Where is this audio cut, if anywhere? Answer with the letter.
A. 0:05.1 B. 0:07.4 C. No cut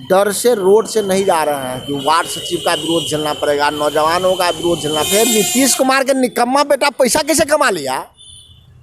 A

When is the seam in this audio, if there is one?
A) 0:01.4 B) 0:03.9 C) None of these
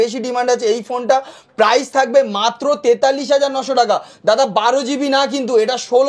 C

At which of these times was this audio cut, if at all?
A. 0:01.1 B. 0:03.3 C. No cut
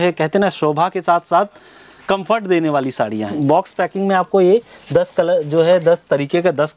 B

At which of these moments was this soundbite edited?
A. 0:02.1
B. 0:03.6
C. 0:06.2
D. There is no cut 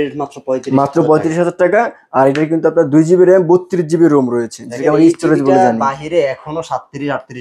D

